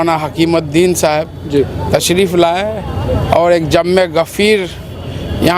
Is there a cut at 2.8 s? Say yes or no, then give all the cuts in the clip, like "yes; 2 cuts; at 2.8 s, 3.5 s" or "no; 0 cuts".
no; 0 cuts